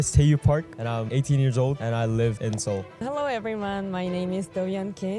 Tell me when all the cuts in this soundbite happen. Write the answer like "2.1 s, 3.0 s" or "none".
1.1 s, 1.8 s, 2.8 s